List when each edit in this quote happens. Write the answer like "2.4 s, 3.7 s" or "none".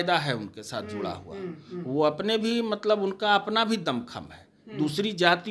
none